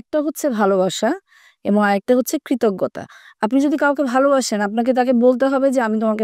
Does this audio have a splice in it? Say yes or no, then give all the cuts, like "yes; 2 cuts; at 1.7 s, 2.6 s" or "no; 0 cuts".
no; 0 cuts